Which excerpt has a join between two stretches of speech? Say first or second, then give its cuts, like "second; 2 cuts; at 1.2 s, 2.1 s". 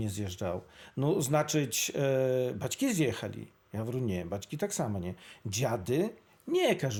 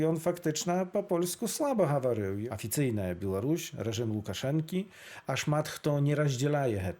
second; 1 cut; at 2.4 s